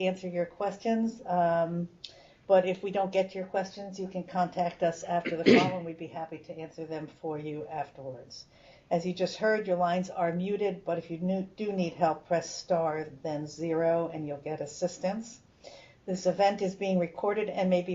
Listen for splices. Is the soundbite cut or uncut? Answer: cut